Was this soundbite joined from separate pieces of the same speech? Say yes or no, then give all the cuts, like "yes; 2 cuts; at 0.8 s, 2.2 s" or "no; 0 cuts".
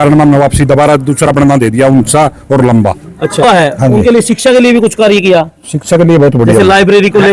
yes; 1 cut; at 3.4 s